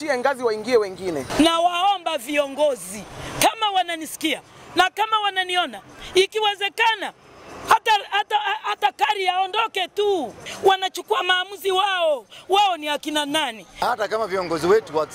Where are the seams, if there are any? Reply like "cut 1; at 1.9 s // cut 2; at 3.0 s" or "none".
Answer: cut 1; at 1.3 s // cut 2; at 10.4 s // cut 3; at 13.8 s